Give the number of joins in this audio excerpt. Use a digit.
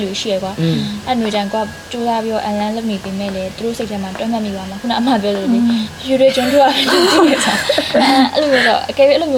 0